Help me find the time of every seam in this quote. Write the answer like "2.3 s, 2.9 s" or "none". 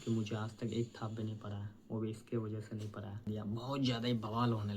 3.2 s